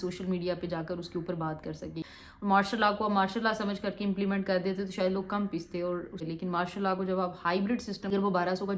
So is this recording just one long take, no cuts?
no; 3 cuts; at 2.0 s, 6.2 s, 8.1 s

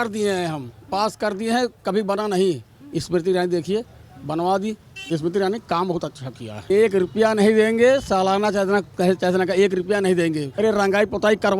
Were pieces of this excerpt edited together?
yes; 3 cuts; at 5.0 s, 6.5 s, 10.5 s

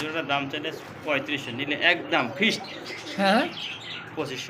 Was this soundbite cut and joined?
no; 0 cuts

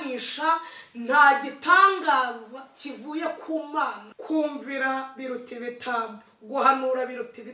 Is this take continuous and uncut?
no; 1 cut; at 4.1 s

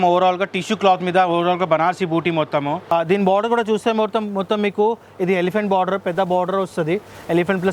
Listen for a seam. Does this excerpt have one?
yes; 1 cut; at 2.9 s

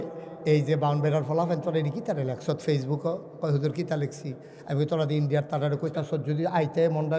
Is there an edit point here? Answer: no; 0 cuts

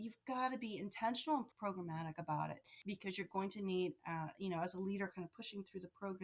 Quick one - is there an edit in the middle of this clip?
yes; 2 cuts; at 1.5 s, 2.7 s

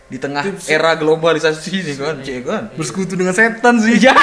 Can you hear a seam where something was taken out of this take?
no; 0 cuts

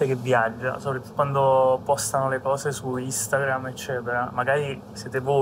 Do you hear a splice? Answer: yes; 1 cut; at 1.1 s

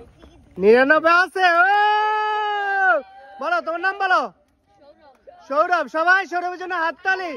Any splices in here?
no; 0 cuts

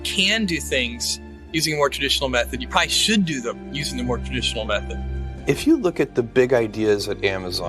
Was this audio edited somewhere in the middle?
yes; 1 cut; at 5.3 s

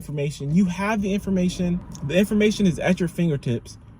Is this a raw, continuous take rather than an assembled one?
no; 1 cut; at 1.9 s

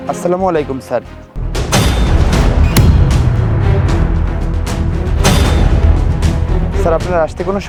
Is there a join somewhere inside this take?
no; 0 cuts

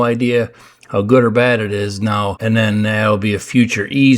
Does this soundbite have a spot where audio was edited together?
yes; 1 cut; at 2.4 s

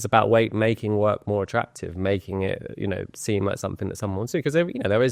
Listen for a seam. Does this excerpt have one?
no; 0 cuts

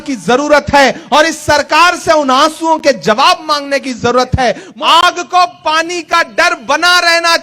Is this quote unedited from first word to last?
no; 1 cut; at 4.7 s

